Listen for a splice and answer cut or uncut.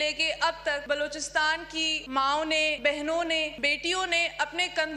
cut